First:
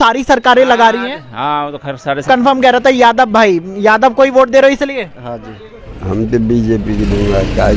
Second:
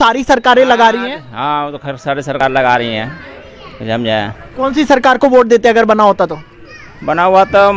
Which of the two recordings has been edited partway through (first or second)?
first